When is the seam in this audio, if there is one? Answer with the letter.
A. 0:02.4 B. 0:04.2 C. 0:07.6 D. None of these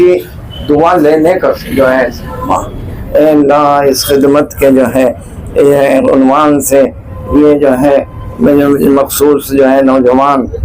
A